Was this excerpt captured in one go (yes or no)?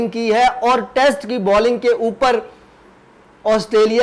yes